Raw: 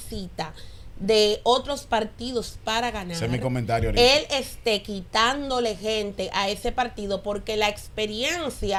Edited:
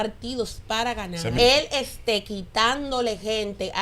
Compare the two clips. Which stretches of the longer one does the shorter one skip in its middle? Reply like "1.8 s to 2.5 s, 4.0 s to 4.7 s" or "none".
3.3 s to 3.9 s